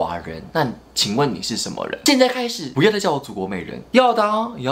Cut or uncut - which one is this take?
cut